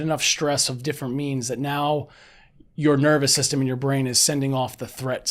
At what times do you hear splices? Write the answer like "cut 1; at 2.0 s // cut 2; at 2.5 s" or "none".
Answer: none

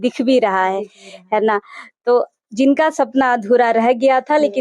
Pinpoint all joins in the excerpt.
none

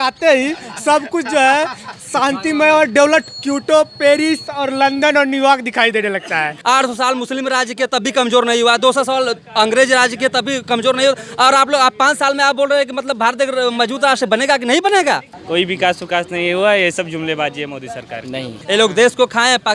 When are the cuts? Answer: cut 1; at 6.5 s // cut 2; at 15.3 s // cut 3; at 18.6 s

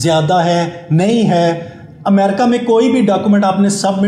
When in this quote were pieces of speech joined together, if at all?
none

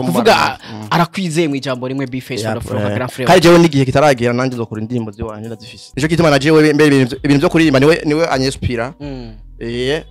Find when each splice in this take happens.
cut 1; at 5.8 s

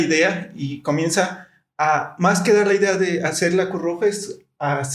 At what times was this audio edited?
none

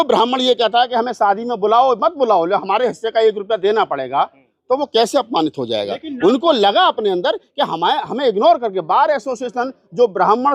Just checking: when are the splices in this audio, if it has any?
none

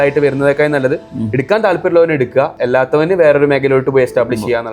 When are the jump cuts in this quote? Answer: cut 1; at 2.6 s

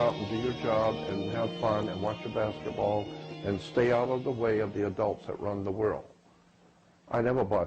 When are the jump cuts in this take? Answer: none

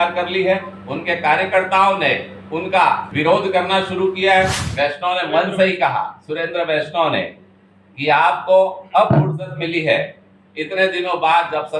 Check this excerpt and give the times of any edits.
cut 1; at 3.1 s // cut 2; at 4.6 s

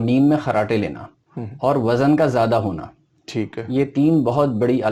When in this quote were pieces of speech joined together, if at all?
none

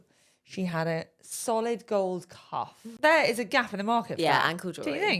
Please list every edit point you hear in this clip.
cut 1; at 2.9 s

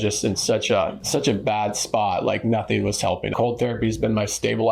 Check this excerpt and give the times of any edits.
cut 1; at 1.0 s // cut 2; at 3.3 s

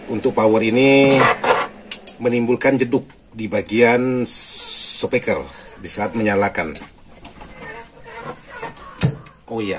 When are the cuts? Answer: cut 1; at 8.8 s

